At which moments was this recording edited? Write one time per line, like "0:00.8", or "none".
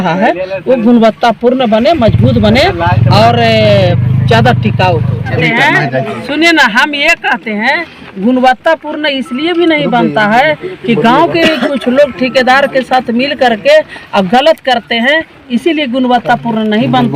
0:05.4